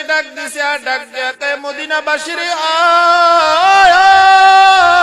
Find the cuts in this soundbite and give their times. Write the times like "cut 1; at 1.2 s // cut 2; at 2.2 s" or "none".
none

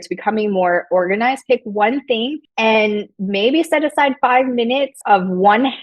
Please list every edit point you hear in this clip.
cut 1; at 2.4 s // cut 2; at 3.1 s // cut 3; at 5.0 s

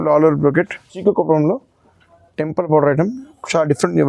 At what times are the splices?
cut 1; at 0.9 s

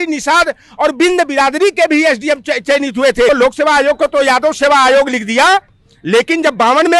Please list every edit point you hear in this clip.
cut 1; at 3.3 s

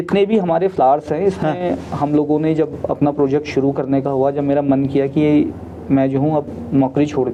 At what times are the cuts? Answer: none

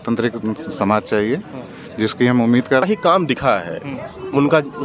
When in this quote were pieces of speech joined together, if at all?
cut 1; at 2.9 s

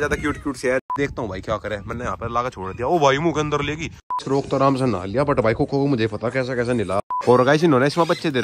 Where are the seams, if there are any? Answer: cut 1; at 0.9 s // cut 2; at 4.1 s // cut 3; at 7.1 s

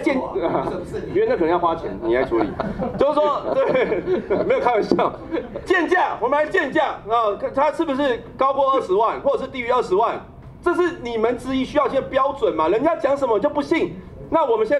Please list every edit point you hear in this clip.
none

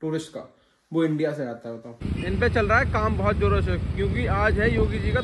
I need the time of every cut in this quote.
cut 1; at 2.0 s

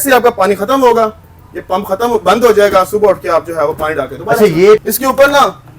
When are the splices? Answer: cut 1; at 4.8 s

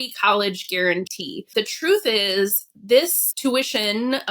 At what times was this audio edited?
cut 1; at 1.5 s // cut 2; at 3.2 s

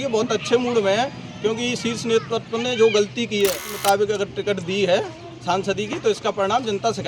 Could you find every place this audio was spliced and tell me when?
cut 1; at 3.7 s

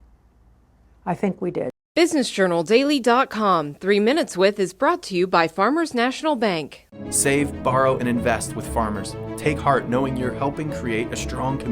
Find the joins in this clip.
cut 1; at 1.8 s

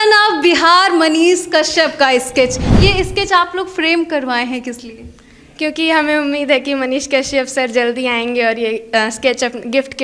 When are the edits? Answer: cut 1; at 2.6 s

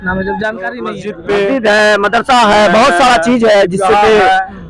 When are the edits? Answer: cut 1; at 1.1 s

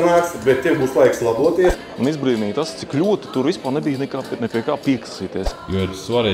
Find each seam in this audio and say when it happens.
cut 1; at 1.8 s // cut 2; at 5.5 s

